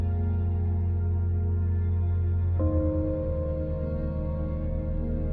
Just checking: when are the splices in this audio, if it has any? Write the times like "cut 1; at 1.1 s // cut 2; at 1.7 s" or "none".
cut 1; at 1.7 s

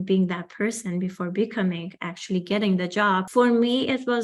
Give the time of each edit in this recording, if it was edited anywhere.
cut 1; at 3.3 s

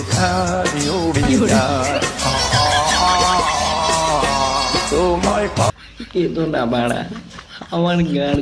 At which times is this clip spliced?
cut 1; at 5.8 s

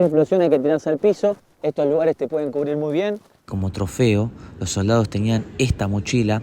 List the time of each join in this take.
cut 1; at 1.5 s // cut 2; at 3.4 s

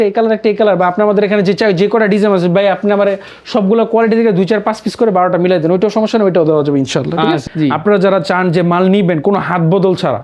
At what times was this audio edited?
cut 1; at 7.4 s

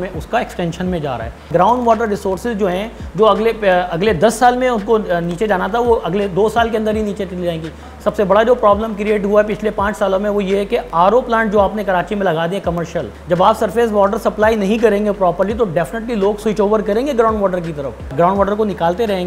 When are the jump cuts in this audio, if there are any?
cut 1; at 1.4 s // cut 2; at 7.9 s // cut 3; at 13.1 s // cut 4; at 18.1 s

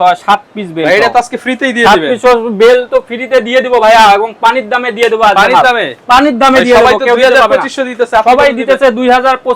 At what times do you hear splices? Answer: none

